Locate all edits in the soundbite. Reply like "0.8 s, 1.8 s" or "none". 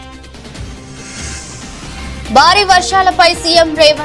none